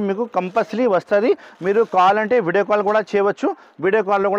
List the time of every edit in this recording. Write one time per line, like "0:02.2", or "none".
none